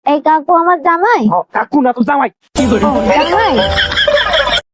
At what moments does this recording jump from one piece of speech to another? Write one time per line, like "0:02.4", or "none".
none